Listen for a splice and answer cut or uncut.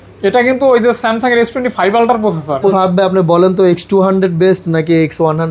cut